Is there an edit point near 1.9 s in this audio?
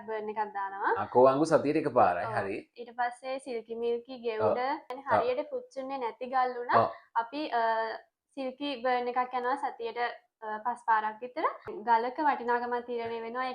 no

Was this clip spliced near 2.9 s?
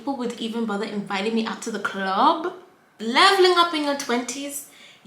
yes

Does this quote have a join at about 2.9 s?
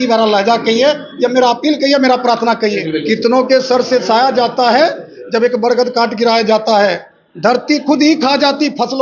yes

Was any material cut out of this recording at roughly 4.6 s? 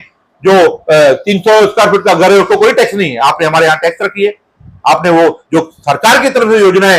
no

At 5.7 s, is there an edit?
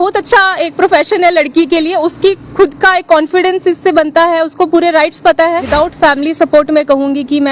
yes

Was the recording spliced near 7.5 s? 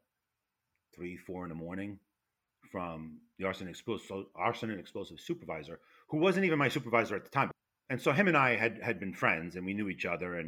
yes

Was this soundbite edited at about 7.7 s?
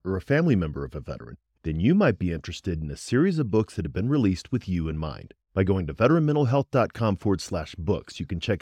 no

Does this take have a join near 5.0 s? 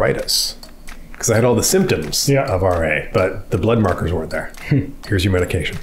yes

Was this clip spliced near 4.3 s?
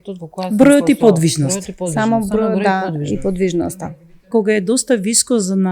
yes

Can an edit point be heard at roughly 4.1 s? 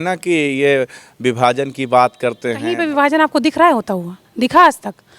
no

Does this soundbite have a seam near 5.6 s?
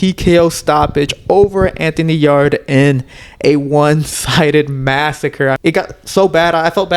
yes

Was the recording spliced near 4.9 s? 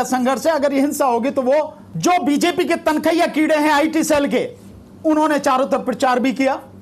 no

